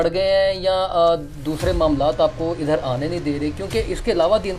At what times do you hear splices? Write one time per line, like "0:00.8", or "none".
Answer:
none